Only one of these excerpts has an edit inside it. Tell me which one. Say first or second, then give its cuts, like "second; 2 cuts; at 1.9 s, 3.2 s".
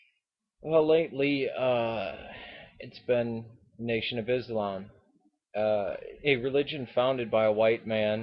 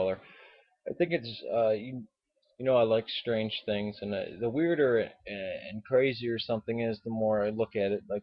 first; 1 cut; at 7.3 s